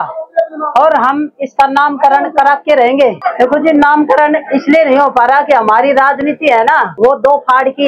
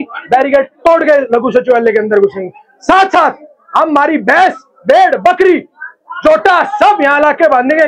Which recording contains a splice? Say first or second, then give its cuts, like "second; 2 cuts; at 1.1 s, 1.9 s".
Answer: first; 2 cuts; at 3.2 s, 6.9 s